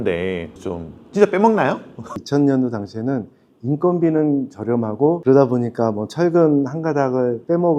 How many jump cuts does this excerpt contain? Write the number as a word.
two